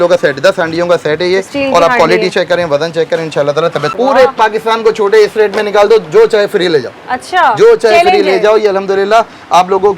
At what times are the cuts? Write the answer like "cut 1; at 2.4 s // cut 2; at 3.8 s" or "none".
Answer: cut 1; at 3.9 s